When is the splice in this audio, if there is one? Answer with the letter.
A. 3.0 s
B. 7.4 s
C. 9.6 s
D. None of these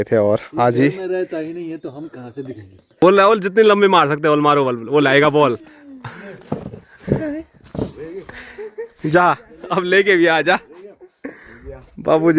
A